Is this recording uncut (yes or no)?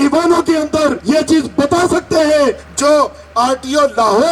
no